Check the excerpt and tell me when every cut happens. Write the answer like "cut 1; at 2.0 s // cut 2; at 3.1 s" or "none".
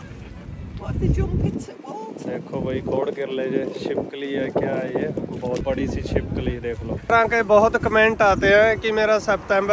cut 1; at 7.1 s